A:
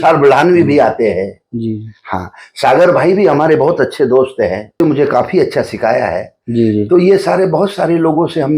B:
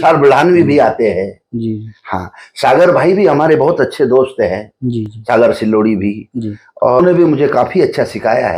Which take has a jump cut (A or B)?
A